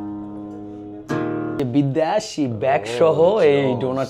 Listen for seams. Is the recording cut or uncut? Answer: cut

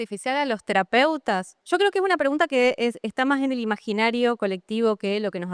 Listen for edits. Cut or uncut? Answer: uncut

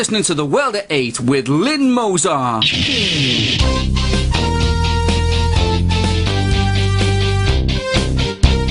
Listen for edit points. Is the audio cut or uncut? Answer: uncut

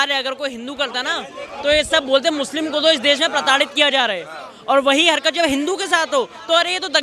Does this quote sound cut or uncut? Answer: uncut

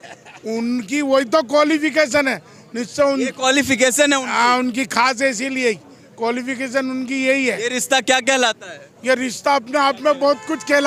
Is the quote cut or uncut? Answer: uncut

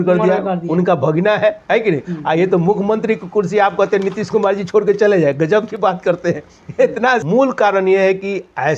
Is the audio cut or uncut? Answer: cut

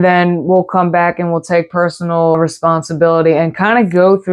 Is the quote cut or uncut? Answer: cut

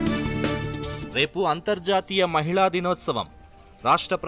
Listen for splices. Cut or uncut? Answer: cut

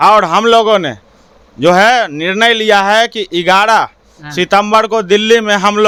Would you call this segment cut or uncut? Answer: uncut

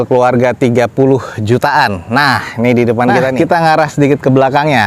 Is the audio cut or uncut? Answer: cut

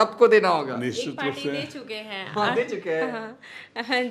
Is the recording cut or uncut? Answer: uncut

